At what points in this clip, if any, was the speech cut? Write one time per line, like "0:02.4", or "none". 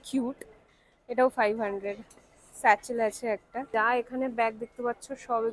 0:03.5